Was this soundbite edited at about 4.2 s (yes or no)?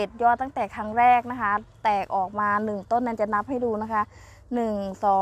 no